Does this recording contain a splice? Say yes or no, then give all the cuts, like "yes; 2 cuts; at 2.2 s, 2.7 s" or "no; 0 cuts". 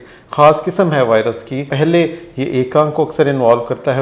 yes; 1 cut; at 1.7 s